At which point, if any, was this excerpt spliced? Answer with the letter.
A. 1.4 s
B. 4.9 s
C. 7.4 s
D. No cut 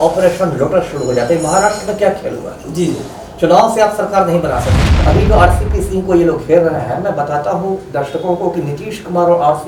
B